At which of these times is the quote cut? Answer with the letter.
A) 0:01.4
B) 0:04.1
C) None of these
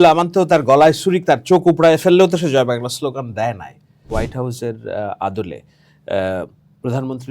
B